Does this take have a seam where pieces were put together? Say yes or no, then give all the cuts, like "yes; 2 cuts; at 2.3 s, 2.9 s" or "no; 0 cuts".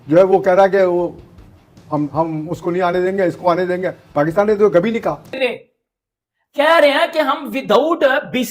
yes; 1 cut; at 5.3 s